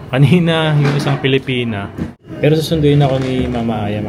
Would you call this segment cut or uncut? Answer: cut